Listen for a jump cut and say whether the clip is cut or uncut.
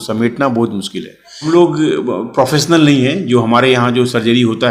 cut